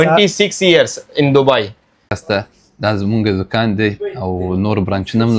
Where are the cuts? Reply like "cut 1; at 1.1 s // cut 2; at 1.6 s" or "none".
cut 1; at 2.1 s